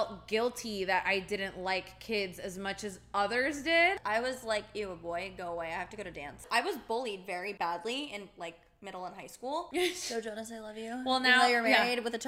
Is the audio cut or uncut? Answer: cut